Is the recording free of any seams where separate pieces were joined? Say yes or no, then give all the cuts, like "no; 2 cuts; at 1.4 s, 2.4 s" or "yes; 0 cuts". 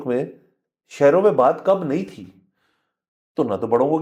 yes; 0 cuts